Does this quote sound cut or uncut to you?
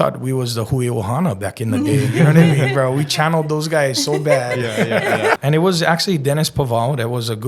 cut